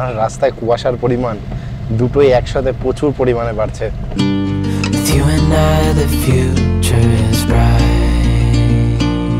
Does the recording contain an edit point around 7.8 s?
no; 1 cut; at 4.0 s

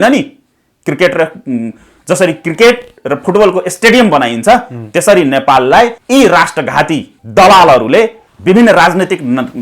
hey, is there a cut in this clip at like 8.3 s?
yes; 3 cuts; at 6.0 s, 7.2 s, 8.3 s

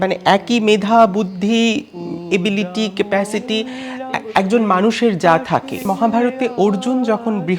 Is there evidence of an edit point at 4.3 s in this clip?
no; 1 cut; at 5.8 s

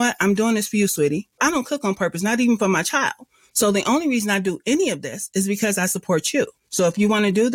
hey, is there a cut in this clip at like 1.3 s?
yes; 2 cuts; at 1.3 s, 6.6 s

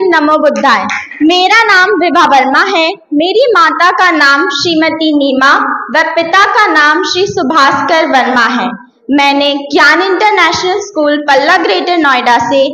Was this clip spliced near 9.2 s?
no; 1 cut; at 1.0 s

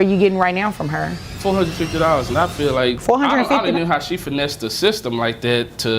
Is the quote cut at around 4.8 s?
no; 2 cuts; at 1.2 s, 3.0 s

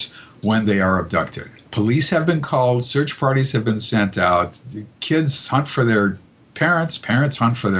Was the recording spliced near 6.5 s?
no; 1 cut; at 1.7 s

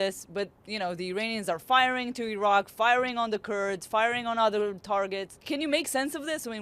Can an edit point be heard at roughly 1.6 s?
no; 1 cut; at 5.3 s

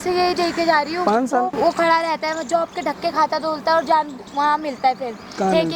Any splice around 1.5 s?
yes; 1 cut; at 1.5 s

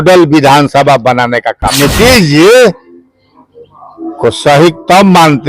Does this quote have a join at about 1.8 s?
yes; 1 cut; at 1.8 s

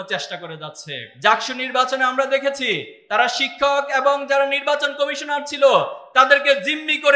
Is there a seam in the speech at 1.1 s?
yes; 1 cut; at 1.1 s

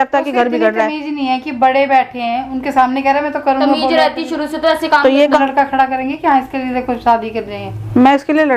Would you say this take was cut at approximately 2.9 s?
no; 1 cut; at 5.4 s

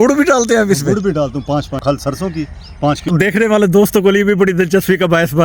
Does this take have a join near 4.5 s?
no; 2 cuts; at 1.8 s, 3.1 s

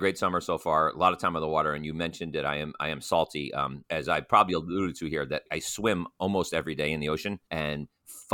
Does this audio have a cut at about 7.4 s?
yes; 3 cuts; at 3.8 s, 5.5 s, 7.4 s

